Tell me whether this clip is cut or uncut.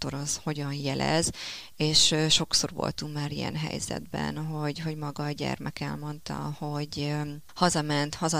cut